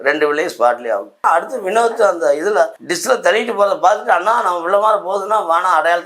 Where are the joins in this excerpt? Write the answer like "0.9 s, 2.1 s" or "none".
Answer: 1.2 s, 2.9 s